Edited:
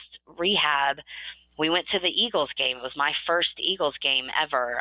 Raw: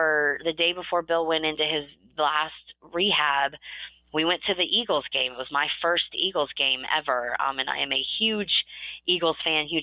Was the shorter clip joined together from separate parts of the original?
no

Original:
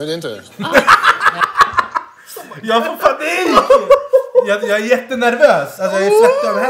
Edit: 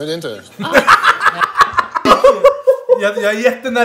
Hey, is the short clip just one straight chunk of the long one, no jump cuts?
no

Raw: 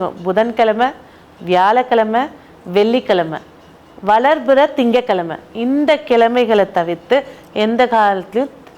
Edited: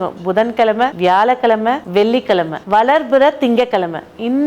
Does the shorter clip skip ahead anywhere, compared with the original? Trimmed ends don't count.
yes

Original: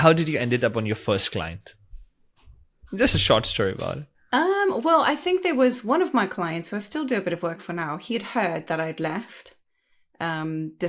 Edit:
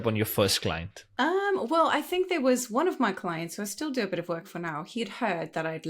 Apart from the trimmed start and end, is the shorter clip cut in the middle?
yes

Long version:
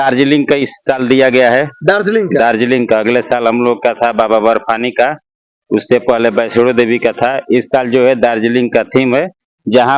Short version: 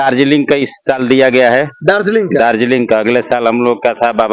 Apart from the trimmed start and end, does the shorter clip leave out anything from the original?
no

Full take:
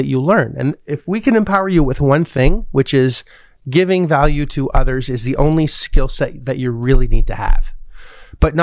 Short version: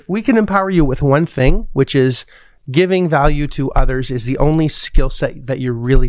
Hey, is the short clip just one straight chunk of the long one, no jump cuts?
yes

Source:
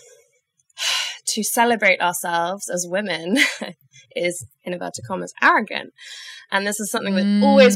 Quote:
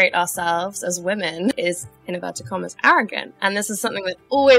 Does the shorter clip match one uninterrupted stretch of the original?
no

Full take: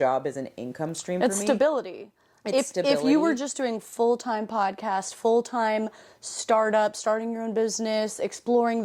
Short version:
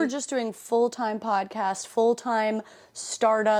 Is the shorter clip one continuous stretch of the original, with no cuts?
yes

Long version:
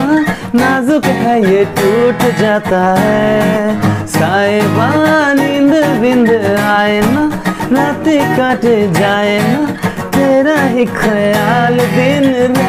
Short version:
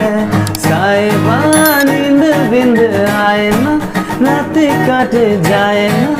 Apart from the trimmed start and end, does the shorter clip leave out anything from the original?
no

